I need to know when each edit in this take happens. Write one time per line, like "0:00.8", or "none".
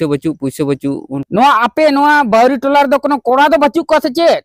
0:01.1